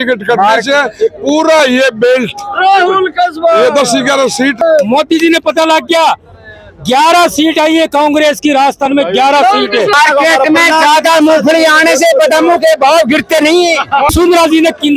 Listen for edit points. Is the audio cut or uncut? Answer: cut